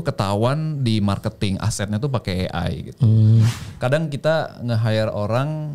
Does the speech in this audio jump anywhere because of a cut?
yes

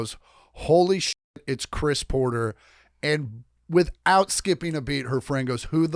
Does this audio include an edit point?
no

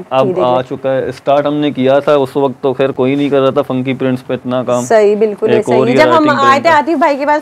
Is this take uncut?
yes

